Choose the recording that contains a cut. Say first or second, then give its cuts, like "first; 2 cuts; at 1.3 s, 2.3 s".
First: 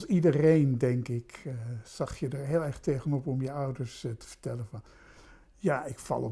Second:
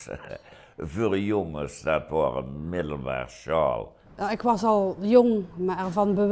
second; 1 cut; at 4.0 s